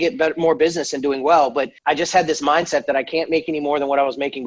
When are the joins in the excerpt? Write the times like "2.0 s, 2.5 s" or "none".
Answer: 1.7 s